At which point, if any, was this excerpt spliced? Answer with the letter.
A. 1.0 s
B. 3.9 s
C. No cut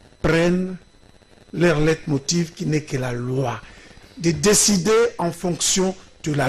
C